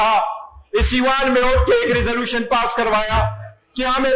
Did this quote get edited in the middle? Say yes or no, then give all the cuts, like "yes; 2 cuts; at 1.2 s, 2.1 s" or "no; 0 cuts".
no; 0 cuts